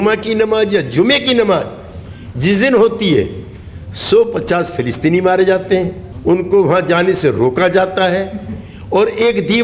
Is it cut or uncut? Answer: cut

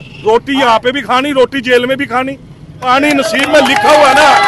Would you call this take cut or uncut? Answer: cut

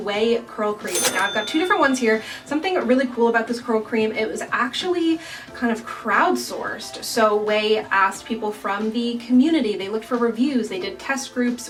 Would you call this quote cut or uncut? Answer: uncut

